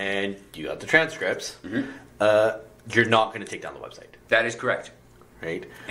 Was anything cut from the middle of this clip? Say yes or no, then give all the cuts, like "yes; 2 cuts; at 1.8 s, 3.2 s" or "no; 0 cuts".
no; 0 cuts